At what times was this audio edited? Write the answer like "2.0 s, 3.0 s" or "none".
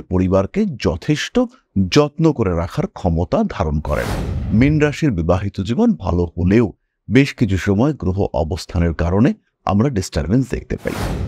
4.3 s